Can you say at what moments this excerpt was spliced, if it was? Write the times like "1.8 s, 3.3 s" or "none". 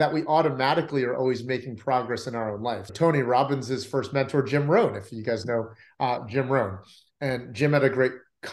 2.9 s